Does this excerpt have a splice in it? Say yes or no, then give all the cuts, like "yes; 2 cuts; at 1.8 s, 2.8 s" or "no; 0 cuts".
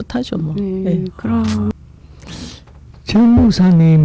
yes; 1 cut; at 1.8 s